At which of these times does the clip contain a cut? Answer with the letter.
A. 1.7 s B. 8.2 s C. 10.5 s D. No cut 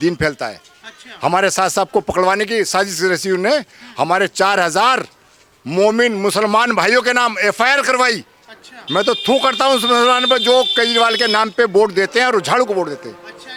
D